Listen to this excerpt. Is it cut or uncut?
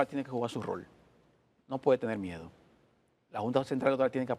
uncut